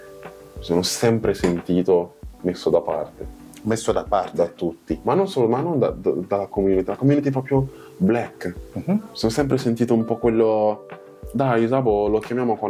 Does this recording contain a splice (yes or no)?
no